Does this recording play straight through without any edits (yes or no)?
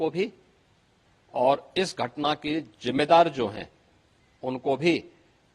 yes